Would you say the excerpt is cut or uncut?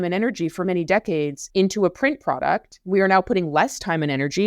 cut